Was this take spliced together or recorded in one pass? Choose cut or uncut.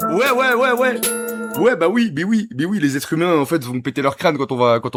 uncut